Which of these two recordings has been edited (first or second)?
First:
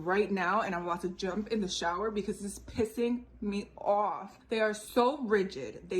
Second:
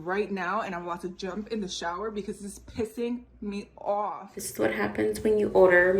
second